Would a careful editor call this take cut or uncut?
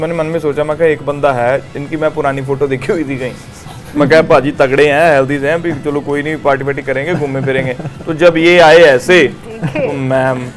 uncut